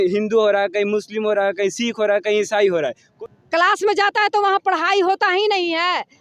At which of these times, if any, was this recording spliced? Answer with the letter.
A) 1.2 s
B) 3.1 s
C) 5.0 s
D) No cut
B